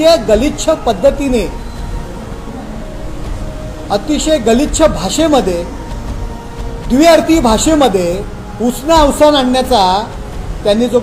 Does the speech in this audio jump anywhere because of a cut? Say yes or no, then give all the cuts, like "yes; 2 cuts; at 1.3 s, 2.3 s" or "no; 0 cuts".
no; 0 cuts